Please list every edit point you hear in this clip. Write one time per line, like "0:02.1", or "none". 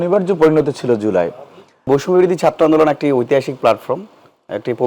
0:01.9